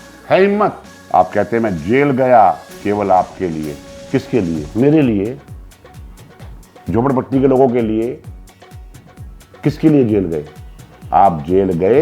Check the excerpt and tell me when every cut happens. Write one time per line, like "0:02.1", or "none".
0:00.9